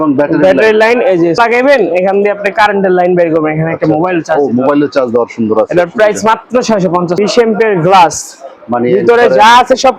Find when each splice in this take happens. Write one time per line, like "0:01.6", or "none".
0:01.4
0:07.2